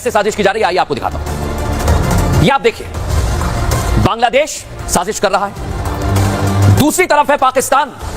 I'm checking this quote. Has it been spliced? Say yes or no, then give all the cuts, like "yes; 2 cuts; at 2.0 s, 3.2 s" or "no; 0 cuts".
no; 0 cuts